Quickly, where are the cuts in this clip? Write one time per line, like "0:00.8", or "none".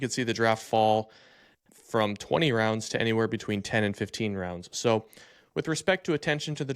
none